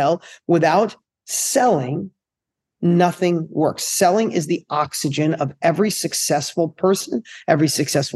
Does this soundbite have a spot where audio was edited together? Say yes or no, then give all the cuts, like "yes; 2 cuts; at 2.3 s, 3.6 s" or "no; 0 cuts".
no; 0 cuts